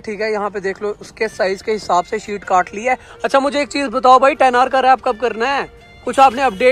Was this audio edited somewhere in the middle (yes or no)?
no